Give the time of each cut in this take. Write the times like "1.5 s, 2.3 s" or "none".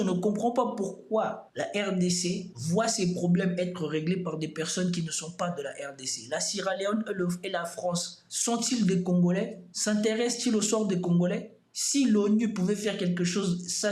none